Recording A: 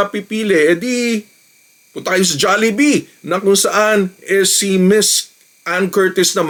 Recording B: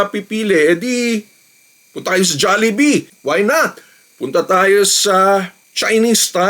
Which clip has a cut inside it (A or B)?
B